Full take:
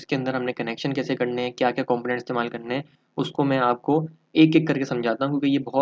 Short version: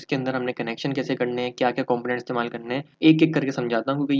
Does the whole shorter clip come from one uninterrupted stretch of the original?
no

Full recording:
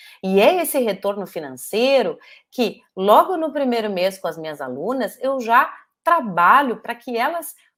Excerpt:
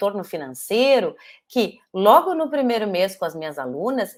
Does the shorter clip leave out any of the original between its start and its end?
no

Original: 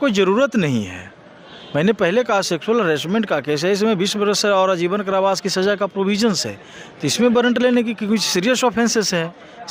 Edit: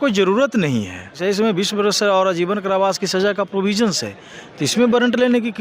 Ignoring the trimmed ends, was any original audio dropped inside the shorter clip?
yes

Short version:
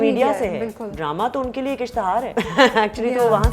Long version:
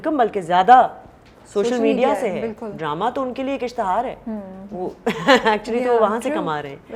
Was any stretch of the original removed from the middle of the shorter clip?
yes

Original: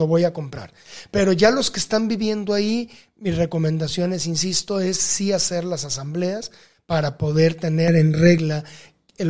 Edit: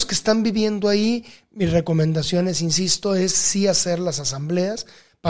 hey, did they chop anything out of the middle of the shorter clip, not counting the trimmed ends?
no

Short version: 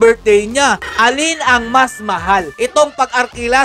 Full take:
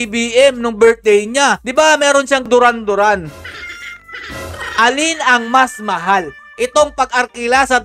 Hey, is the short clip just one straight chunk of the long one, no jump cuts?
no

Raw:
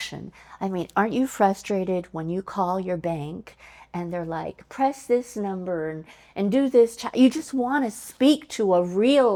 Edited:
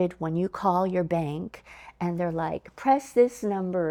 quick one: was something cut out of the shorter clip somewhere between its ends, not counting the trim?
no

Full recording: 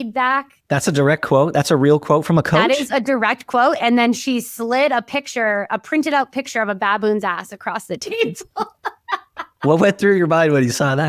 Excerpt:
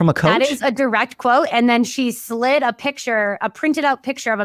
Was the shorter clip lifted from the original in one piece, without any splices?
yes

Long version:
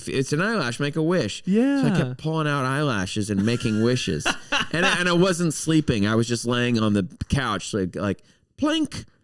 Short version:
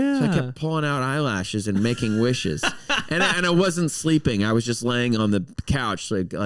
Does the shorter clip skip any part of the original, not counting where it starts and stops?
no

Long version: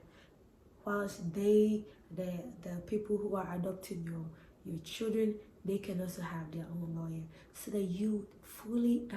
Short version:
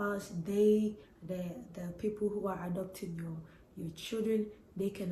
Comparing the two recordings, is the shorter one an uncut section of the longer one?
yes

